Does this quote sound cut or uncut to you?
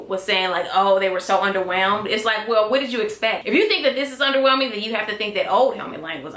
uncut